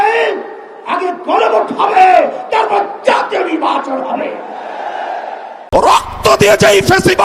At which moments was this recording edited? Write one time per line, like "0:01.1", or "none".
0:05.5